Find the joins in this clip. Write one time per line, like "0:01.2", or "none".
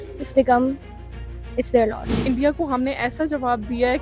0:02.2